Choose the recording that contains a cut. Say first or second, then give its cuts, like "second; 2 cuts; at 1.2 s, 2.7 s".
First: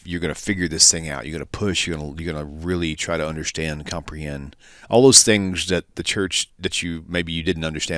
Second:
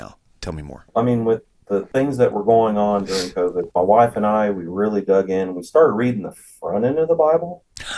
second; 3 cuts; at 0.9 s, 1.9 s, 3.7 s